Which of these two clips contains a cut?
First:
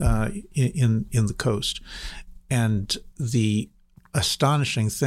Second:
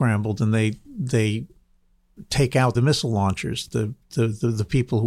second; 1 cut; at 2.7 s

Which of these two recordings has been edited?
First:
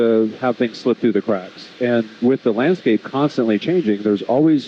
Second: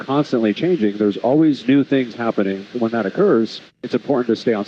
second; 1 cut; at 2.7 s

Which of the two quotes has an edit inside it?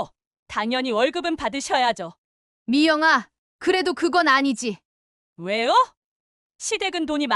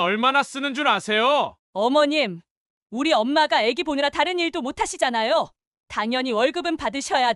second; 1 cut; at 1.6 s

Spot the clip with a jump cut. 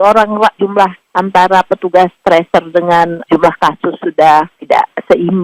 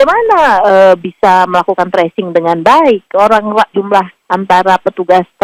first; 2 cuts; at 3.2 s, 4.6 s

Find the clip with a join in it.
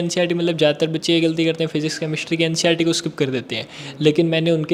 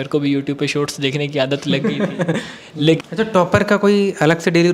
second; 1 cut; at 3.0 s

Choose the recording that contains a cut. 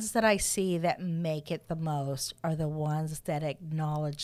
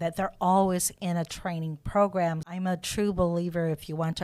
second; 1 cut; at 2.5 s

